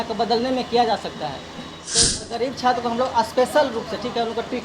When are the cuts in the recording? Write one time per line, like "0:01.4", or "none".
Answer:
0:01.8